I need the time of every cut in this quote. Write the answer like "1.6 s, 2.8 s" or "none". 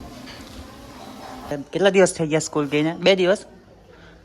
1.6 s